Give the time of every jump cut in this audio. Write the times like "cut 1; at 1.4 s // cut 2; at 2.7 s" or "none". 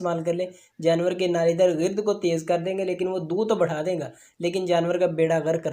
none